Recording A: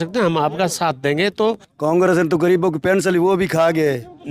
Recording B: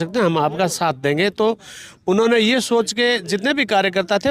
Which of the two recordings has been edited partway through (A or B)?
A